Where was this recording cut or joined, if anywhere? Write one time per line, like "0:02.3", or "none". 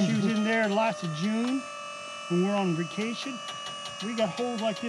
none